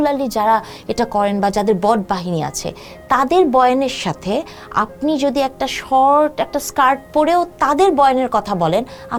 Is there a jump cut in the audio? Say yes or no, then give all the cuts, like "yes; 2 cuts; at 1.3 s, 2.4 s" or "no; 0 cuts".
no; 0 cuts